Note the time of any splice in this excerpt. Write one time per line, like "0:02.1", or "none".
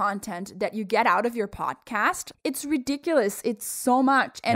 0:02.3